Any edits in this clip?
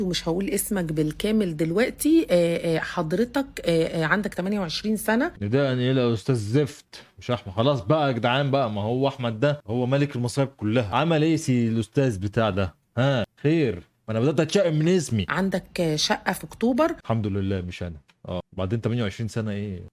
no; 0 cuts

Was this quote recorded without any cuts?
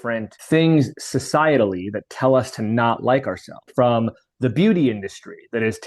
no; 1 cut; at 3.7 s

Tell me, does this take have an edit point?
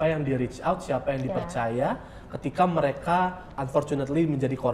yes; 1 cut; at 3.5 s

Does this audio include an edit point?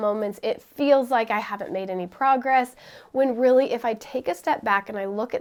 no; 0 cuts

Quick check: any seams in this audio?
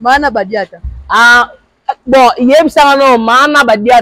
no; 0 cuts

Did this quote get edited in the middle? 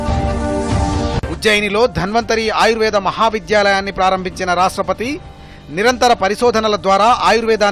yes; 1 cut; at 1.2 s

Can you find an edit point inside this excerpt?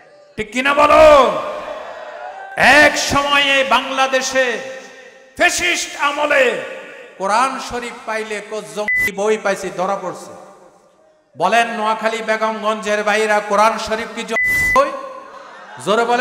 no; 0 cuts

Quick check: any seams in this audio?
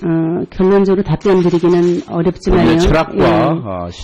no; 0 cuts

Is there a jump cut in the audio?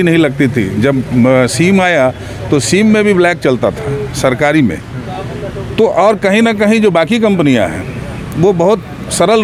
no; 0 cuts

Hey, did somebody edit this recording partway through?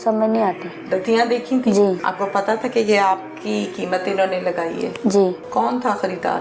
yes; 2 cuts; at 2.0 s, 5.4 s

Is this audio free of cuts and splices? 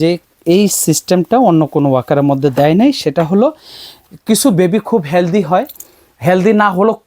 yes; 0 cuts

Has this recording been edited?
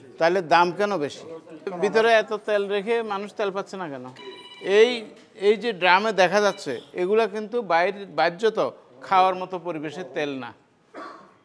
yes; 2 cuts; at 1.7 s, 4.1 s

